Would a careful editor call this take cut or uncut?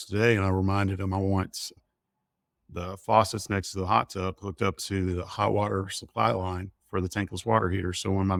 uncut